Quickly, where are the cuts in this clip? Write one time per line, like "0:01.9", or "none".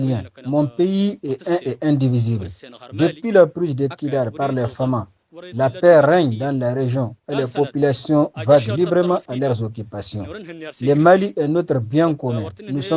none